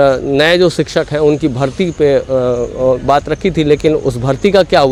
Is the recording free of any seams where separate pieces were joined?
yes; 0 cuts

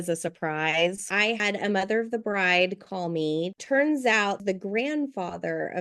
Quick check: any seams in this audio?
yes; 3 cuts; at 1.2 s, 3.6 s, 4.4 s

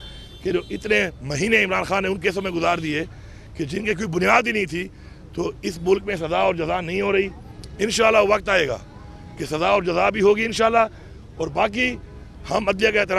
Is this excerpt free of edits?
yes; 0 cuts

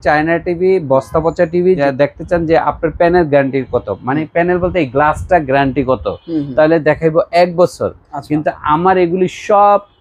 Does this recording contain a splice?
yes; 1 cut; at 1.8 s

